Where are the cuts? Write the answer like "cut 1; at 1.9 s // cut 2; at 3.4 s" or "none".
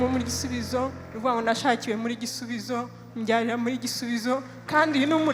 none